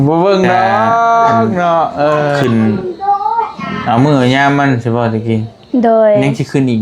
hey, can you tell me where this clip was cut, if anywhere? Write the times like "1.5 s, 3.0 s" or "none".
2.4 s